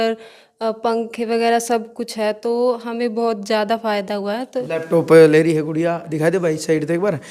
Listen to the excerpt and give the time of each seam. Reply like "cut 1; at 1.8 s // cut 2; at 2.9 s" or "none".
none